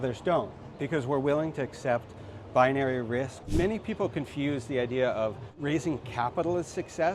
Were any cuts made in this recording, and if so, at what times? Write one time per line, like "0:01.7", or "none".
0:03.5
0:05.5